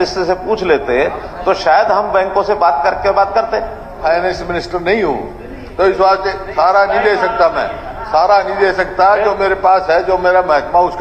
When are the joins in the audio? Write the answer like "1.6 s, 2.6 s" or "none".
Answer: 4.0 s